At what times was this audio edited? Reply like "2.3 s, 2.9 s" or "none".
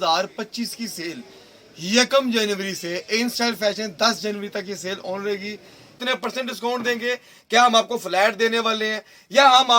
5.9 s